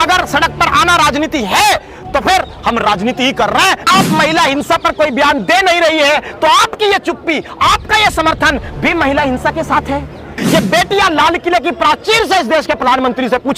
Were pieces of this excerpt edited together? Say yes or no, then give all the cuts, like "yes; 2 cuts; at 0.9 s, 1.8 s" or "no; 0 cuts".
yes; 2 cuts; at 3.9 s, 10.4 s